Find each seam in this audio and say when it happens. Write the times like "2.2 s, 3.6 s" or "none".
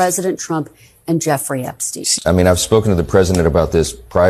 2.1 s